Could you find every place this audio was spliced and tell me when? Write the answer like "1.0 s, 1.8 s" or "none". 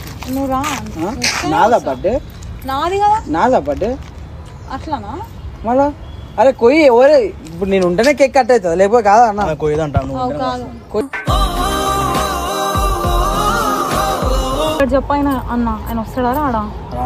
14.8 s